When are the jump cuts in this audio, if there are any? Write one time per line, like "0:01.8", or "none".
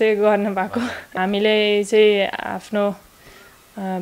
0:01.1